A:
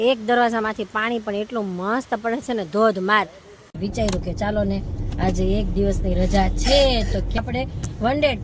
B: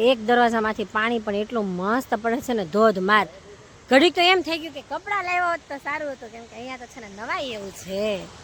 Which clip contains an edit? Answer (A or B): A